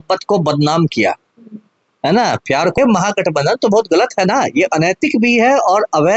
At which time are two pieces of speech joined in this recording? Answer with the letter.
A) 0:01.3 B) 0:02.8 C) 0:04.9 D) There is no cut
B